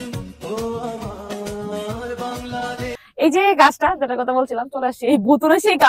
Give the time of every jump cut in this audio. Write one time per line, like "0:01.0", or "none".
0:02.9